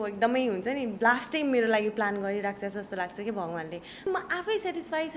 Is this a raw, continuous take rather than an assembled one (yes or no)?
no